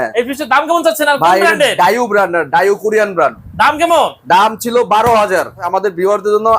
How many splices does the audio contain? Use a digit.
1